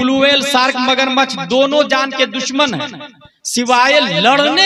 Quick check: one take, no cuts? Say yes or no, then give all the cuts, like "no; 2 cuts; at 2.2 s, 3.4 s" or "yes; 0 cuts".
yes; 0 cuts